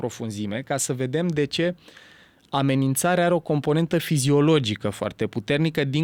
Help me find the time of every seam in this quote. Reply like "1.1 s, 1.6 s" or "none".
none